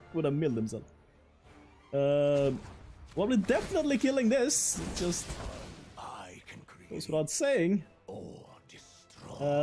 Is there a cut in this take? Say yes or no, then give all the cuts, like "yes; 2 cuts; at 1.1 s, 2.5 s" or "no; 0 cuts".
no; 0 cuts